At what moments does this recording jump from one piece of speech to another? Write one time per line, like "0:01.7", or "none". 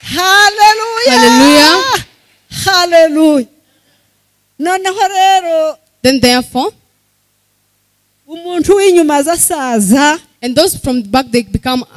none